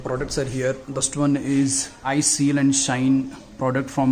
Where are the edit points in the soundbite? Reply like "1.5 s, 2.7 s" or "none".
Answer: 1.0 s, 2.1 s